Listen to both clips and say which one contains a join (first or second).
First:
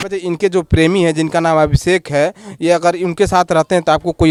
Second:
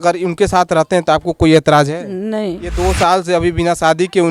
second